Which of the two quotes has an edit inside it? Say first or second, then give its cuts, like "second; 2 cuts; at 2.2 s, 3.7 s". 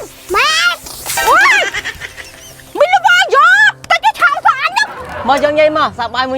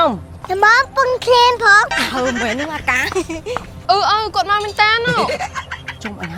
first; 1 cut; at 5.1 s